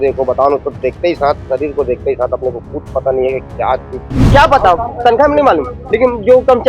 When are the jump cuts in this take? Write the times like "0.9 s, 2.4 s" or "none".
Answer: 4.3 s